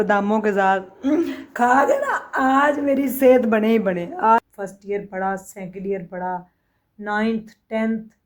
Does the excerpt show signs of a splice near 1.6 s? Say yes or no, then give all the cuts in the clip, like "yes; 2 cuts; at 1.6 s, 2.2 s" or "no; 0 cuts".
no; 1 cut; at 4.4 s